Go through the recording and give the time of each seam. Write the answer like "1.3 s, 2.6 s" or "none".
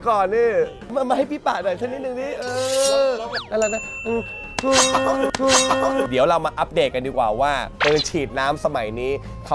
0.9 s, 6.1 s